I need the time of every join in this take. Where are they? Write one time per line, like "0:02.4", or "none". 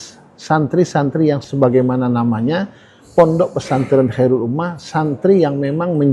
0:01.4